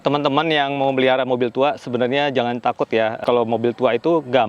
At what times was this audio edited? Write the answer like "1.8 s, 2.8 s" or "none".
3.2 s

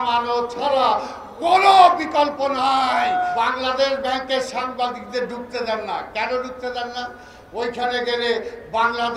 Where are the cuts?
3.3 s

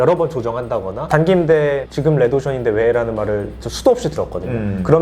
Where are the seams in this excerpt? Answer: 1.0 s

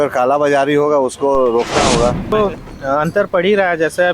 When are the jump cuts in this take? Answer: 2.3 s

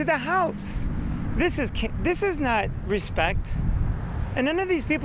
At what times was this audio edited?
none

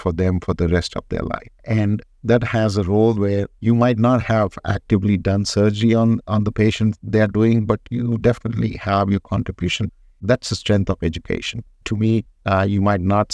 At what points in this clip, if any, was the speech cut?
1.9 s, 3.5 s, 9.9 s, 12.3 s

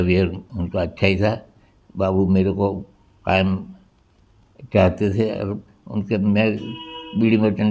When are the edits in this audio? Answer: none

